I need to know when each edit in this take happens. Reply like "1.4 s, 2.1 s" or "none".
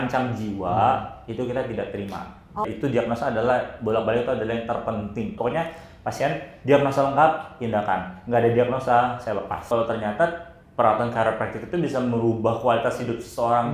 2.6 s, 5.4 s, 9.7 s